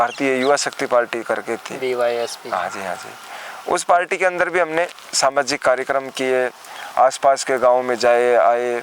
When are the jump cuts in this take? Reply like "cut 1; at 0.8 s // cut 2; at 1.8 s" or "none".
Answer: none